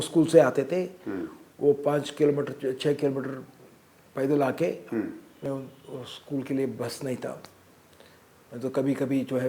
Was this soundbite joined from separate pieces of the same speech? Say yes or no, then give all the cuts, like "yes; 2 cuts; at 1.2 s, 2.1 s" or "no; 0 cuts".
yes; 1 cut; at 5.5 s